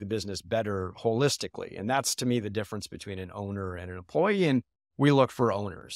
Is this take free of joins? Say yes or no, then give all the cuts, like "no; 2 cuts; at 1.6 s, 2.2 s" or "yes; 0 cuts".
yes; 0 cuts